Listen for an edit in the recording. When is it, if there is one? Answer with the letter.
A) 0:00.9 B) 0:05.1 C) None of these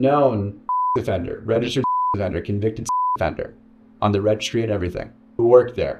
A